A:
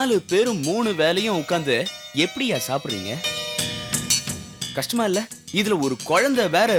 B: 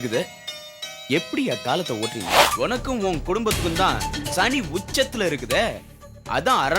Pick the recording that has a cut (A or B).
B